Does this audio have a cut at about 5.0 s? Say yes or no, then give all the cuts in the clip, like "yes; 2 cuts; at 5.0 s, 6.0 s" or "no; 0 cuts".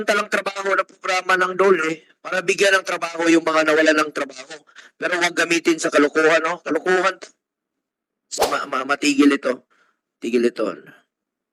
no; 1 cut; at 8.3 s